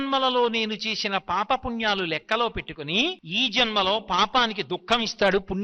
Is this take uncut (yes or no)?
no